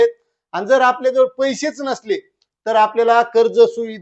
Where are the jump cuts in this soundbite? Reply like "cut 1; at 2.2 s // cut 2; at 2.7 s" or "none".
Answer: none